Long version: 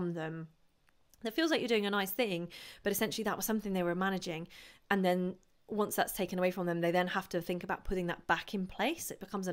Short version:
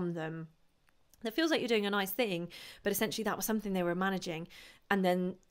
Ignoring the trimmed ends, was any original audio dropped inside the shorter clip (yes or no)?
no